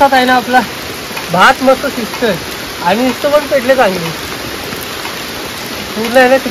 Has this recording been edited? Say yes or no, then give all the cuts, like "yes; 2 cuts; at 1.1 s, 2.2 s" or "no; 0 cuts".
no; 0 cuts